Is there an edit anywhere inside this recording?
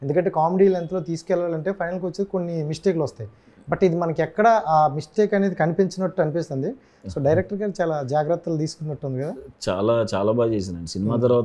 no; 0 cuts

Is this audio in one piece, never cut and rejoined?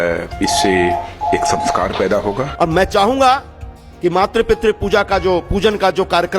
no; 1 cut; at 2.5 s

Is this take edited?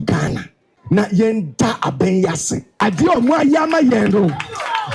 yes; 2 cuts; at 1.0 s, 2.8 s

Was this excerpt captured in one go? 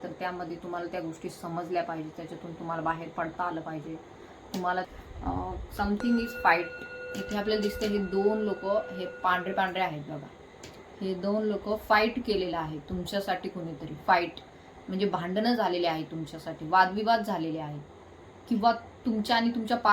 no; 1 cut; at 4.9 s

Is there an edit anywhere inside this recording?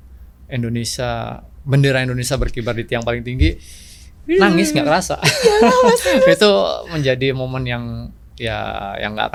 no; 0 cuts

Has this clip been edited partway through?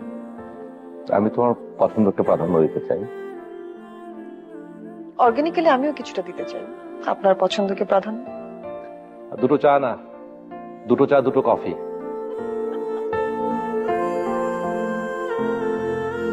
no; 0 cuts

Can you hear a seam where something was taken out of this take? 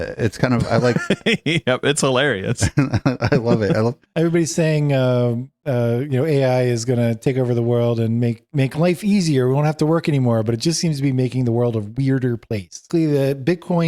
yes; 2 cuts; at 4.0 s, 12.8 s

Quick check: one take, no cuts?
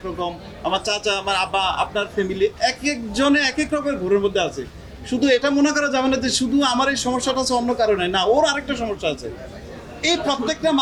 yes; 0 cuts

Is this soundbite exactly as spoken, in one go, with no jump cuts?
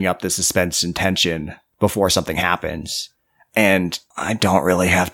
no; 2 cuts; at 1.6 s, 4.1 s

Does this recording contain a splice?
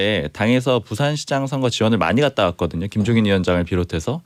no; 0 cuts

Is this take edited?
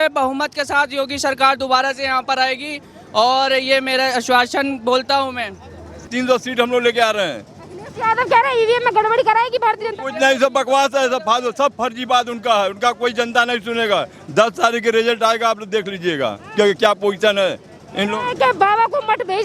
yes; 1 cut; at 6.1 s

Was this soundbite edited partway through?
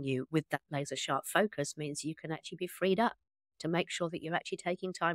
no; 0 cuts

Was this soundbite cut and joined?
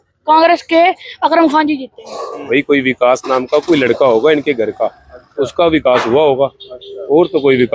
yes; 1 cut; at 2.5 s

